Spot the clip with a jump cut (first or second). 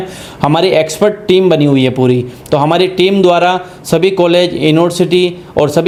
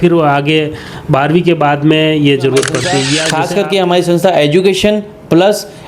second